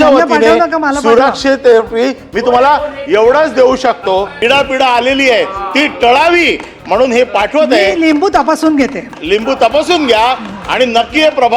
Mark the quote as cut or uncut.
cut